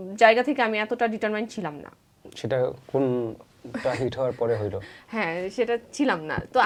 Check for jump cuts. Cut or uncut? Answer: uncut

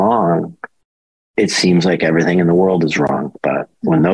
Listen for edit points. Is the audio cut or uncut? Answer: uncut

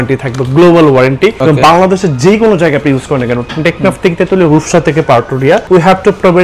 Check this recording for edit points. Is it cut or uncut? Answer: cut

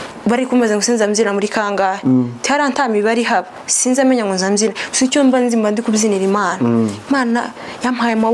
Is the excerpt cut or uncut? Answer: uncut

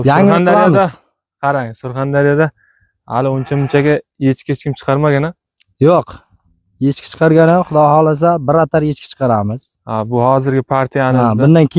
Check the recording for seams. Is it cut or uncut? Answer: uncut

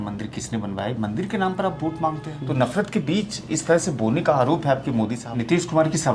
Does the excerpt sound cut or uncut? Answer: cut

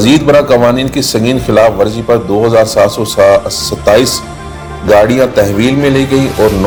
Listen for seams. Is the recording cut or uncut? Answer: uncut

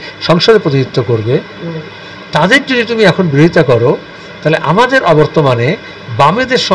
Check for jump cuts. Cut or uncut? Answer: uncut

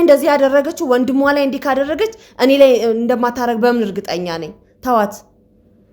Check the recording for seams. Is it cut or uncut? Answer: uncut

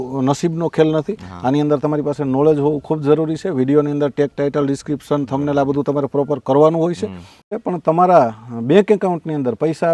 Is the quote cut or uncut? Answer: cut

